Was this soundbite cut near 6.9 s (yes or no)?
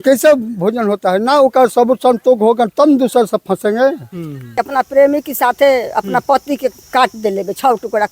no